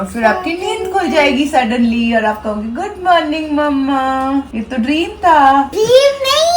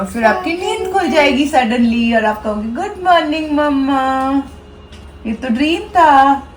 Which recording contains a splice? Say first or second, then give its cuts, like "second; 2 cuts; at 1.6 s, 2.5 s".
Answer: first; 2 cuts; at 4.6 s, 5.7 s